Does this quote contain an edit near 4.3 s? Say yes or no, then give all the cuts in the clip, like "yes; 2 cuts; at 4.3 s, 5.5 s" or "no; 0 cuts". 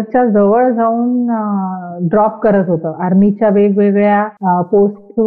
yes; 1 cut; at 4.3 s